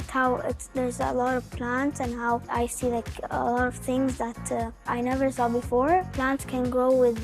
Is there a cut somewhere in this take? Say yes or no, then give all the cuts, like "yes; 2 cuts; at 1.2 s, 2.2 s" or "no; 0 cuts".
yes; 3 cuts; at 2.5 s, 4.9 s, 6.1 s